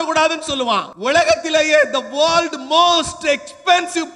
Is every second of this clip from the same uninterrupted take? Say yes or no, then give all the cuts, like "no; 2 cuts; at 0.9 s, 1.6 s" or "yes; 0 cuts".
no; 1 cut; at 0.9 s